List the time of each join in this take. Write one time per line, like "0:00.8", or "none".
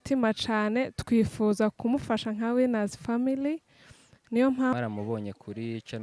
0:04.7